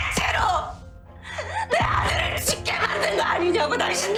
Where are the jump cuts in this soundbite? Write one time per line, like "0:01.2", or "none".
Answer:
none